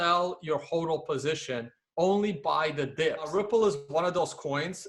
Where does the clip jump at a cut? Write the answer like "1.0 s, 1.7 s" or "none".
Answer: 3.3 s